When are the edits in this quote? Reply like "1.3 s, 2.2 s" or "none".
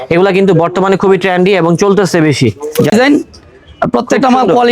2.9 s